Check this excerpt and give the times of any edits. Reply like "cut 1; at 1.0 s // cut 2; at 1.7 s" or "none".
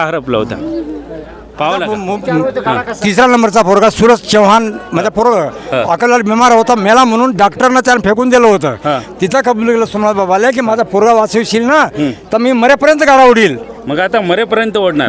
cut 1; at 2.0 s